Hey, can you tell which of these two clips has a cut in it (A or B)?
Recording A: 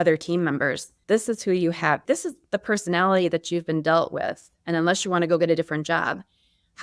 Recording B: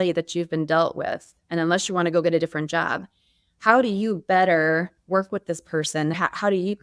A